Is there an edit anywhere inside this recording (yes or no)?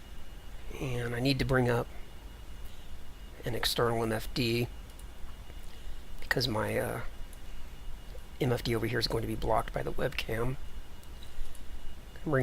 yes